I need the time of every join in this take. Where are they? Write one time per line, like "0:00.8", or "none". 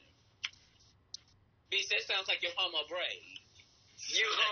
none